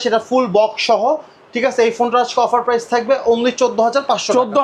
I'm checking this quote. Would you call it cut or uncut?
uncut